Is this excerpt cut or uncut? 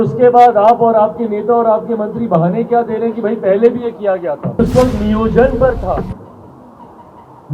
cut